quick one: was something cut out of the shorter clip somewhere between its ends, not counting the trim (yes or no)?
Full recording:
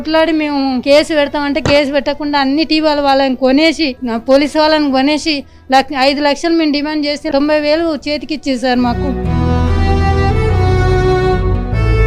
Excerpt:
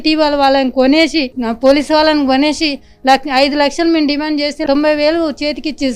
no